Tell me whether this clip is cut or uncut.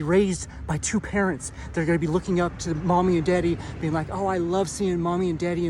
uncut